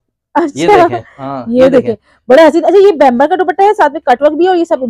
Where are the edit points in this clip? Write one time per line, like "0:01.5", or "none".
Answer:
none